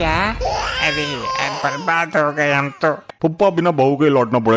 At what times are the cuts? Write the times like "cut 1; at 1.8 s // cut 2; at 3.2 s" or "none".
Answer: cut 1; at 3.1 s